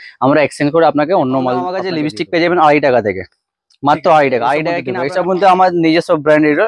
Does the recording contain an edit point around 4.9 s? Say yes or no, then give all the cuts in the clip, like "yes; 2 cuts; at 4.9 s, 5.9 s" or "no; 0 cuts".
yes; 2 cuts; at 1.8 s, 4.9 s